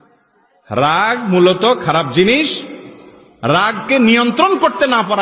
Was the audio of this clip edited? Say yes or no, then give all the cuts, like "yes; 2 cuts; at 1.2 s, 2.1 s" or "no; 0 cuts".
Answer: no; 0 cuts